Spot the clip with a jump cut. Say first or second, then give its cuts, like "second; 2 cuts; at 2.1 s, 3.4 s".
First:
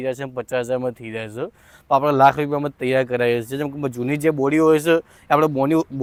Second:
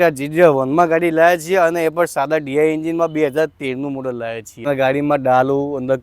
second; 1 cut; at 4.5 s